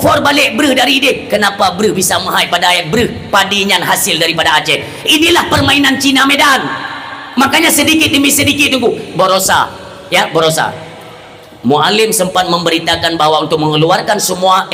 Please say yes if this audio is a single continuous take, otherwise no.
yes